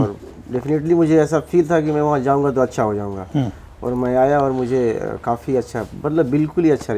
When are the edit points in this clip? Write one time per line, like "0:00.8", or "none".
none